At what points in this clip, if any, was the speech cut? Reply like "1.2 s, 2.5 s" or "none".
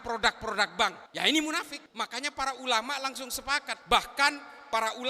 1.0 s, 1.8 s, 3.7 s